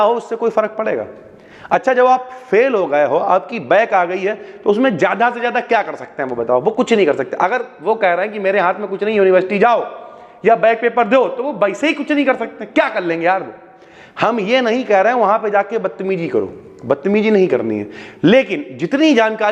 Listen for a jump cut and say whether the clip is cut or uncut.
uncut